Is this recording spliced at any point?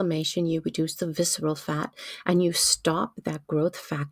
no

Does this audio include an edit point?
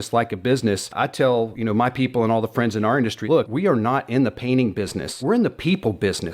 yes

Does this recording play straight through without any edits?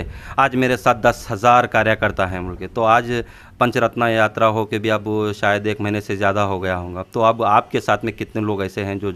yes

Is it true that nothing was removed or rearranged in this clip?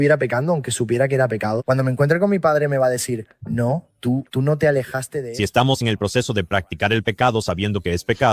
no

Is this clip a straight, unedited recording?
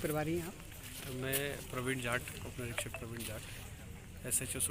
yes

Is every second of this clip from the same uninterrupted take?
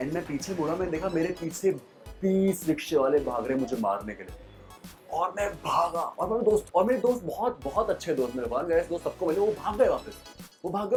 yes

